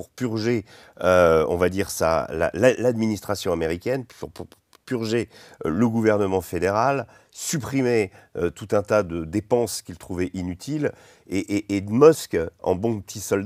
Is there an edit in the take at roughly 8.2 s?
no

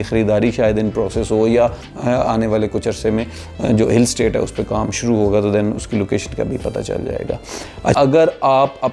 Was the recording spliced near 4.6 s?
no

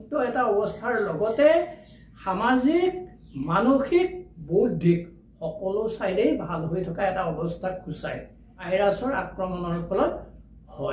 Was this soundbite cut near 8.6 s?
yes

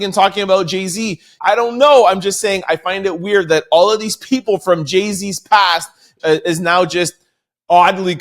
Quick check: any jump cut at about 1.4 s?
yes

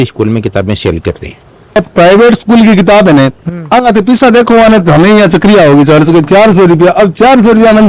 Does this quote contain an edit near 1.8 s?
yes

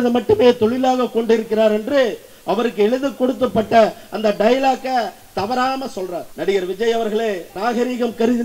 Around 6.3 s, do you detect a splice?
yes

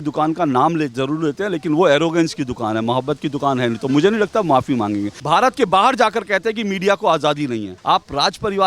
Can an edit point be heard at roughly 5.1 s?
yes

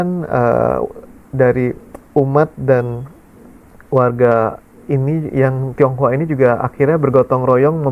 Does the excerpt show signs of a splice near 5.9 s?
no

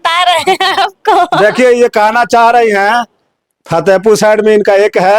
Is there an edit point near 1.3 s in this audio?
no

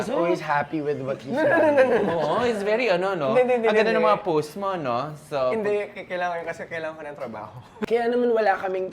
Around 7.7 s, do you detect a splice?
yes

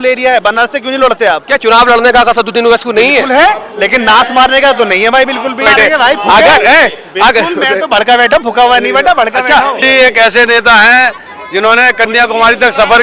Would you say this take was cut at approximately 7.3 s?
no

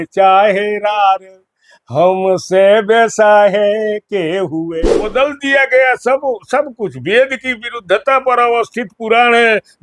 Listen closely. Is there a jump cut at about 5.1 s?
yes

